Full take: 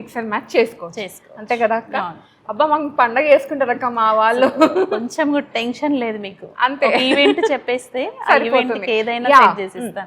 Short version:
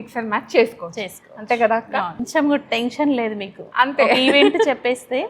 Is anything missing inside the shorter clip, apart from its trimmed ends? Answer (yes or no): yes